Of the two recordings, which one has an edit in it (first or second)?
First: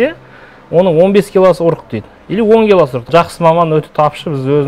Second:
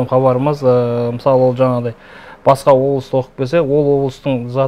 first